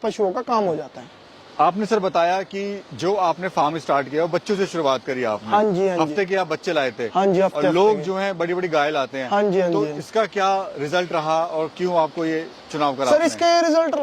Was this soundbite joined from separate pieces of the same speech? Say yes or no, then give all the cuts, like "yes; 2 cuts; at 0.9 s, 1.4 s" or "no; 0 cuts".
no; 0 cuts